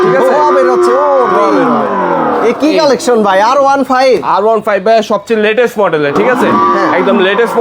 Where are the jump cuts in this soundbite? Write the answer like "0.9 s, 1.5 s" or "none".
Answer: none